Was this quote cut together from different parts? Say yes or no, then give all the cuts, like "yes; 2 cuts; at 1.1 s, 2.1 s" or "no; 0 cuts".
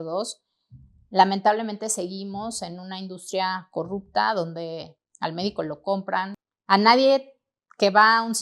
yes; 1 cut; at 6.4 s